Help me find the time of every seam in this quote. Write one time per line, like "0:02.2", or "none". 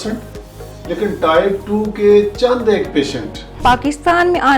0:03.6